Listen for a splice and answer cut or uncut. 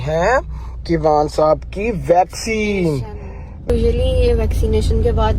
cut